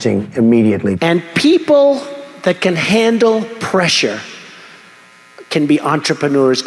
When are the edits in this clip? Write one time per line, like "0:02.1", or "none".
0:01.0